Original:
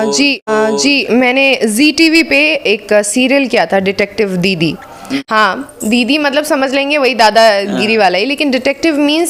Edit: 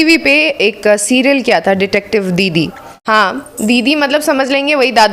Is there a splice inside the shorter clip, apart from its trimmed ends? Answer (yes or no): yes